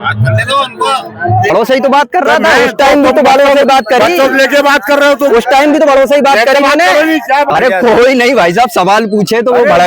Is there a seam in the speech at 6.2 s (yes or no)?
no